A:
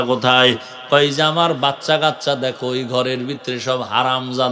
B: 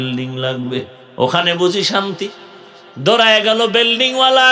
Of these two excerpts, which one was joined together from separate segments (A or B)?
B